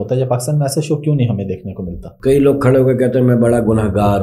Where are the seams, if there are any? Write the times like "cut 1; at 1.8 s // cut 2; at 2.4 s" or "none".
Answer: cut 1; at 2.0 s